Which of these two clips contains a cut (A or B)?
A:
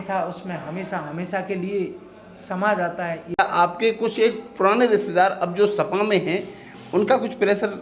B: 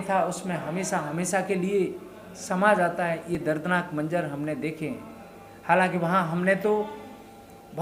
A